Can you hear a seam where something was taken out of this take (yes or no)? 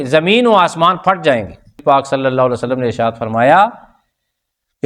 yes